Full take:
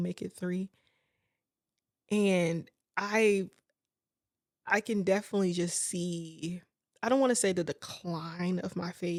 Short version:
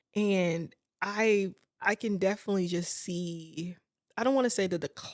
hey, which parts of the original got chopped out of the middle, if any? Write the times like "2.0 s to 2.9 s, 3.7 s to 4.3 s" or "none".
3.6 s to 4.5 s